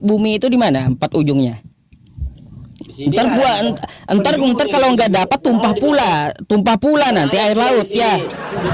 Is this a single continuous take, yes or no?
yes